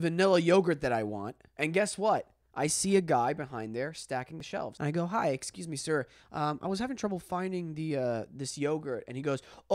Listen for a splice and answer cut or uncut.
cut